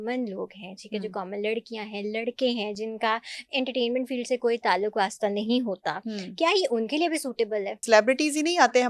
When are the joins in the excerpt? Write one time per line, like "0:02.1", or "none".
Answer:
0:07.8